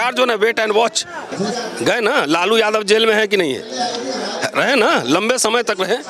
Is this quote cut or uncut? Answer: cut